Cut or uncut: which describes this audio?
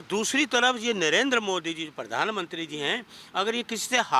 uncut